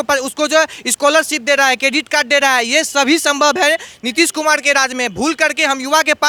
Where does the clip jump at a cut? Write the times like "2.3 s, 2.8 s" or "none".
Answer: none